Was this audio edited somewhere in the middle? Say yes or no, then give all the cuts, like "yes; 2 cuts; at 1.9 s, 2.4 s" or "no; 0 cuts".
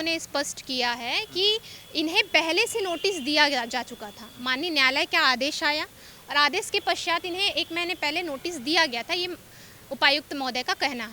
no; 0 cuts